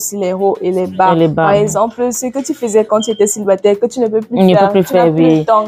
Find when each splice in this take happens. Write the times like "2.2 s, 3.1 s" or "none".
none